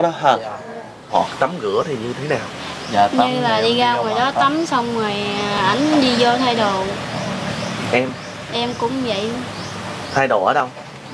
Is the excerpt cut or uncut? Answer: cut